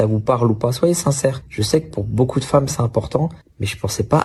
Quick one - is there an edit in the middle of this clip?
no; 0 cuts

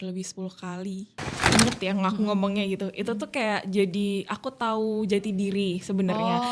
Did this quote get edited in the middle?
yes; 1 cut; at 1.4 s

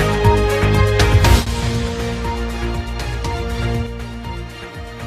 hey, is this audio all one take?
no; 1 cut; at 1.1 s

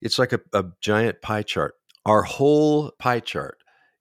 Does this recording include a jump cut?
yes; 2 cuts; at 1.9 s, 2.9 s

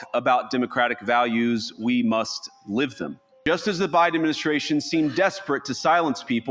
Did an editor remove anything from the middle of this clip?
yes; 1 cut; at 3.3 s

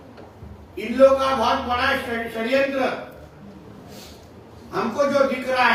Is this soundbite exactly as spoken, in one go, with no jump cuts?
yes; 0 cuts

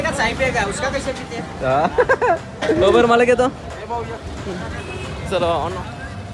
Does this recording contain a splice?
no; 0 cuts

